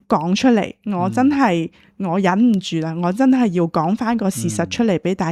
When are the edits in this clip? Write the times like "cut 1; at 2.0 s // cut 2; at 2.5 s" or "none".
none